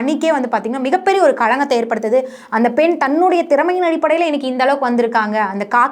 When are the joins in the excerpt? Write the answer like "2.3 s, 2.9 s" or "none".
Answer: none